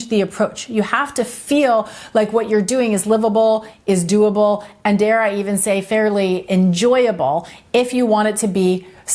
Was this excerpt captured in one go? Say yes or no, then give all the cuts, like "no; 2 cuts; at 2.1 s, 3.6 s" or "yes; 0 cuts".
yes; 0 cuts